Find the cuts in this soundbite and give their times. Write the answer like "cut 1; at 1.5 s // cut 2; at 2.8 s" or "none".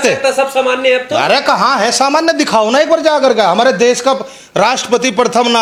none